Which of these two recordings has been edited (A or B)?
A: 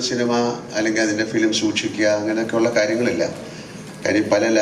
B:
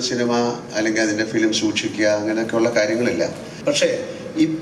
B